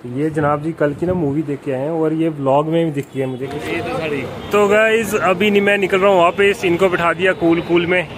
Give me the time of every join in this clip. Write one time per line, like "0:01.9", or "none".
0:03.5